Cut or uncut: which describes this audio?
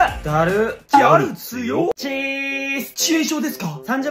cut